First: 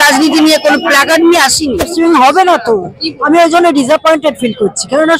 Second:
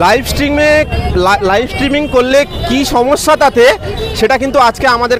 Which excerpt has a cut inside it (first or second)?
first